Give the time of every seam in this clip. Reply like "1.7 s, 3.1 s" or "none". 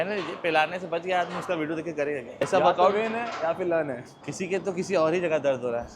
2.3 s, 4.1 s